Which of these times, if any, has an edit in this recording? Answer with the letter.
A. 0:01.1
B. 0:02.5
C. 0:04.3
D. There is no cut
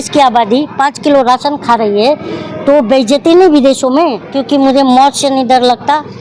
C